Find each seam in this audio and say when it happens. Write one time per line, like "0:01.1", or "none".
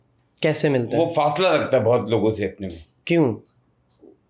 none